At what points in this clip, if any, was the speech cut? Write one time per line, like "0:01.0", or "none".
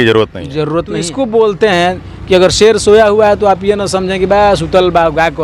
0:01.1